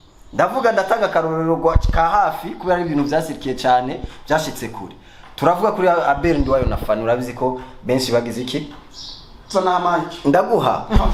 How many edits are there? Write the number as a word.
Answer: zero